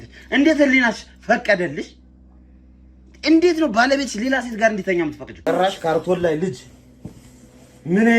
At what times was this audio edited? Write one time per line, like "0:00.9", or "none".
0:05.4